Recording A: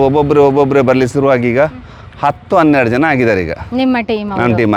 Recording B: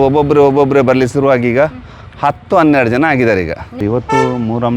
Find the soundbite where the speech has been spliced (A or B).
B